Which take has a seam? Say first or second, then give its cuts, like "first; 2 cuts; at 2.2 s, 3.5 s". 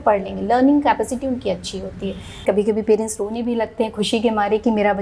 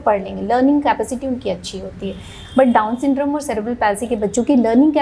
first; 1 cut; at 2.4 s